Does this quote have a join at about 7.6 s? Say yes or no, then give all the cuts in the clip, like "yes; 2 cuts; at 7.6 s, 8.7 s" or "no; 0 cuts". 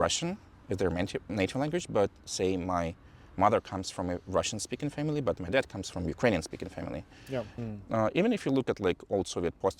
yes; 1 cut; at 7.6 s